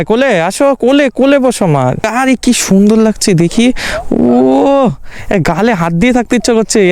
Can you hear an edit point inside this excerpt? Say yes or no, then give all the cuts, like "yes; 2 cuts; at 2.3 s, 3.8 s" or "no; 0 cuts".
yes; 1 cut; at 2.0 s